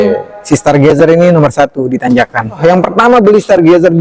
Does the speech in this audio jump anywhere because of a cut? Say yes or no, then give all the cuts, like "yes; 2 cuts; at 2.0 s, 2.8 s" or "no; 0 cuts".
yes; 1 cut; at 2.6 s